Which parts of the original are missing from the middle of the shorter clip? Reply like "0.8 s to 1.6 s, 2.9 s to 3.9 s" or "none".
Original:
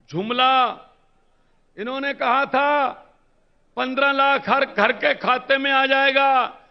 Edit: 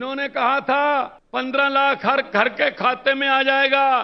3.0 s to 3.6 s